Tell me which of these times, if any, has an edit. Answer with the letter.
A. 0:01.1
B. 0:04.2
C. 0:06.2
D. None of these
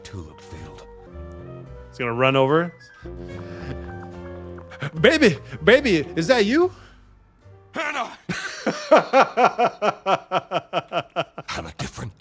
A